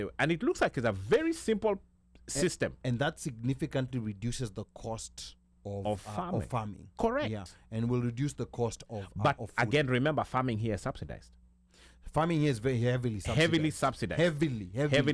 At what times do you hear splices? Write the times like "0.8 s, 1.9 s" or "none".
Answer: none